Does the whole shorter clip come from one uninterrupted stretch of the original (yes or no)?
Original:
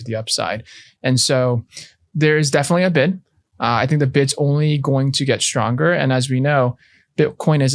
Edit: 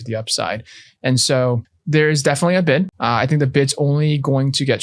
no